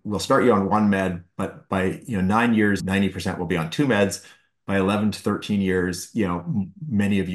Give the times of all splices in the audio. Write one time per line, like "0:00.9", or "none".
0:02.8